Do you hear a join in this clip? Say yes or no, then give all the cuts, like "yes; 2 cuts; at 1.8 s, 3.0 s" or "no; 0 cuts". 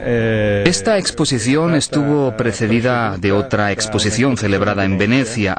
no; 0 cuts